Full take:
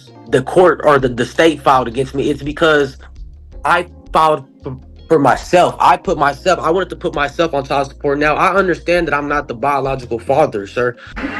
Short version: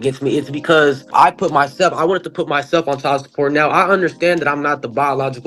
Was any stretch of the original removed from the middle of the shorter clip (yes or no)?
yes